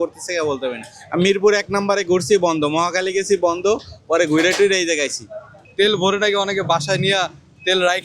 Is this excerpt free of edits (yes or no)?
no